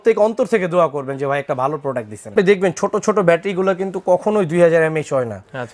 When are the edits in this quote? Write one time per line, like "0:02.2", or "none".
0:02.3